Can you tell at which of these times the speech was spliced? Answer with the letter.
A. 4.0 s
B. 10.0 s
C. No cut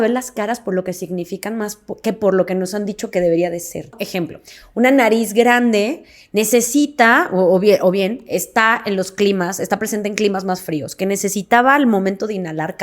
A